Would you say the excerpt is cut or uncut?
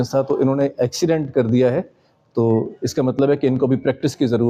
uncut